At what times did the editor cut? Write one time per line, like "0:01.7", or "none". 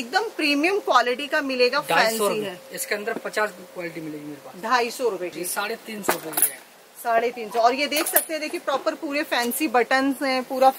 0:05.3